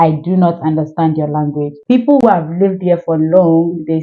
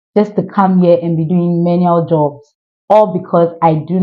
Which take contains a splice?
first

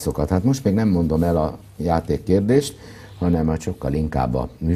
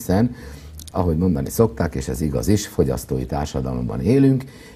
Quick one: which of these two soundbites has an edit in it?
first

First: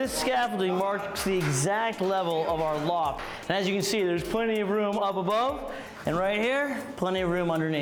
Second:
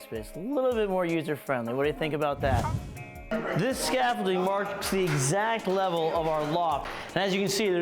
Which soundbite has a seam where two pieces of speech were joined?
second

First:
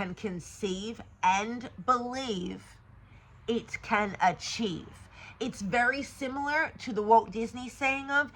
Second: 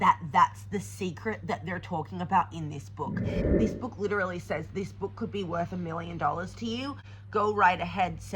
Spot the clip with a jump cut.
second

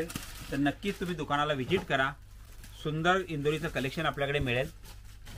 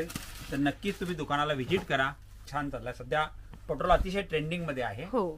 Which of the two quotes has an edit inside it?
second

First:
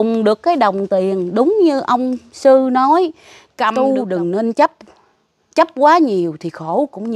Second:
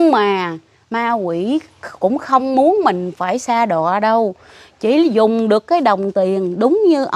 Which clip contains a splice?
first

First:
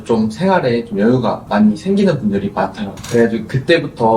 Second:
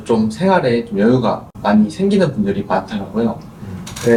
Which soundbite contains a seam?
first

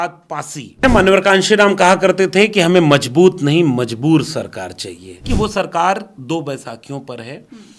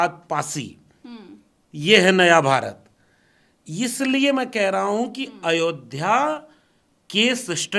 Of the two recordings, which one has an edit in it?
first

